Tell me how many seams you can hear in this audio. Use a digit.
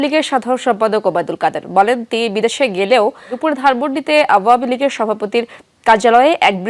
1